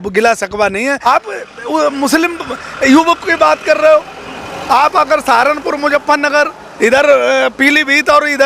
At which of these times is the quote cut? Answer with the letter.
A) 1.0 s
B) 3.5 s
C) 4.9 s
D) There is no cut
A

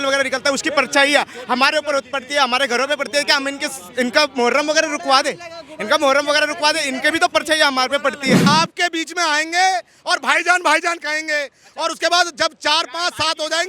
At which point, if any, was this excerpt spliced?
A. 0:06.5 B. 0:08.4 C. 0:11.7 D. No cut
B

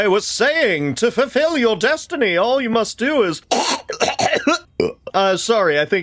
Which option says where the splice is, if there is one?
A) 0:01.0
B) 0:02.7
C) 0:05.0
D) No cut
C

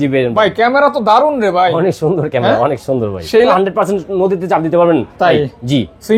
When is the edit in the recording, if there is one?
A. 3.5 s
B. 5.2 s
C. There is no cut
A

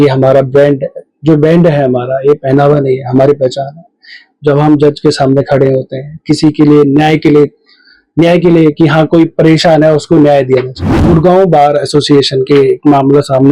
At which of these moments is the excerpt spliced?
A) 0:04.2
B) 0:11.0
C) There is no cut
B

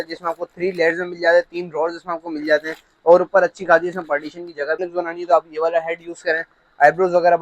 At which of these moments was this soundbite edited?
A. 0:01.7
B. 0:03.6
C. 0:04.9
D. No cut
C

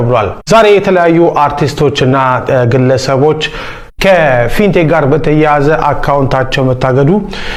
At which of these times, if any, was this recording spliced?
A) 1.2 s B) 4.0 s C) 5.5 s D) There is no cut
D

